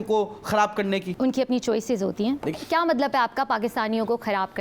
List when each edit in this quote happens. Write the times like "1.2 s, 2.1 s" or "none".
2.5 s